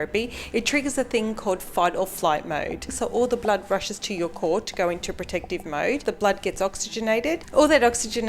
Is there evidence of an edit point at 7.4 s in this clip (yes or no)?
yes